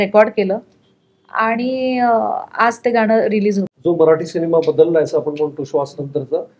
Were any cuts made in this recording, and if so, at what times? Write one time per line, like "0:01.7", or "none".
0:03.7